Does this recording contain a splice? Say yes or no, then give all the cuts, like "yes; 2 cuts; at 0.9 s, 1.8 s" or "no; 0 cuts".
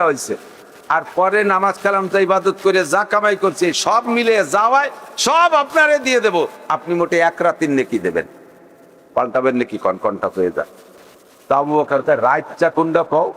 no; 0 cuts